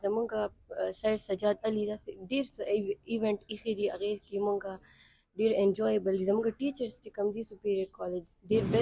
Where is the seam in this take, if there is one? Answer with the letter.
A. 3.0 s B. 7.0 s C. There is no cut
C